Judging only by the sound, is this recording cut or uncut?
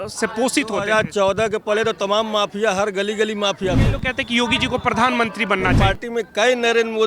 cut